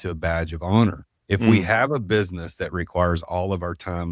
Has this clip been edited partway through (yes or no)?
yes